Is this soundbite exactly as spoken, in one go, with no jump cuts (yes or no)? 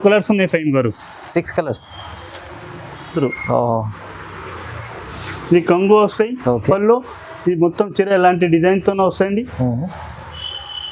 no